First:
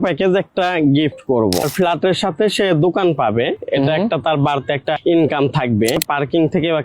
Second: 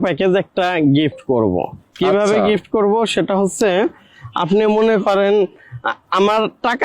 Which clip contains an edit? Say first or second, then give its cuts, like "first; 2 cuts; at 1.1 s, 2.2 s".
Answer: first; 3 cuts; at 1.7 s, 5.0 s, 6.0 s